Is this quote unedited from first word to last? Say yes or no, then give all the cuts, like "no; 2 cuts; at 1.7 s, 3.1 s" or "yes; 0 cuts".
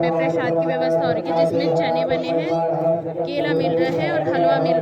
yes; 0 cuts